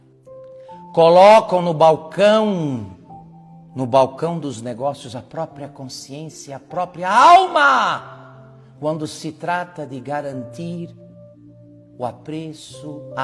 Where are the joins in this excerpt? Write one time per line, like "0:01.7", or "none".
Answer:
0:00.9